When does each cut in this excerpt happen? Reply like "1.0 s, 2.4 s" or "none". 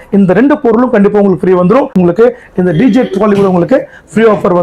1.9 s